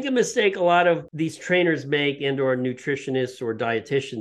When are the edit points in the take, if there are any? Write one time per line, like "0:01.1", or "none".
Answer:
0:01.1